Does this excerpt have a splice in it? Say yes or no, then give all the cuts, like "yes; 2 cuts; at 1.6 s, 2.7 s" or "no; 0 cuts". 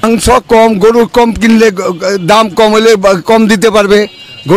no; 0 cuts